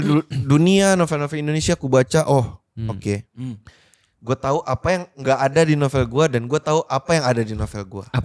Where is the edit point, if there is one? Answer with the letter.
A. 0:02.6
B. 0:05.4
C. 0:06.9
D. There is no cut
D